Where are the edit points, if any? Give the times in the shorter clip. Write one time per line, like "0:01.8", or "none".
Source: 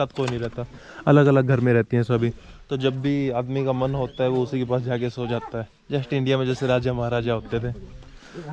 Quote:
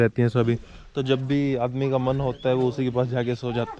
none